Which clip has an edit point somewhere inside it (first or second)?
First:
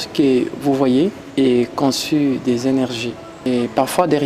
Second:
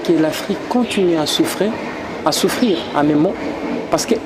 first